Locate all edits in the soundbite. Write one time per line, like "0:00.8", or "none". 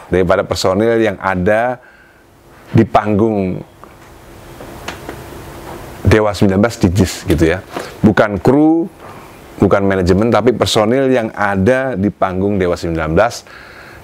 none